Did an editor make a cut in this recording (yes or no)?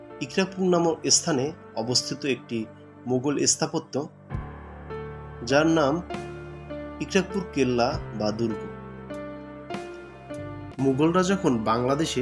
yes